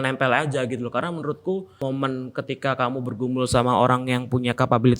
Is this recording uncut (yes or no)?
no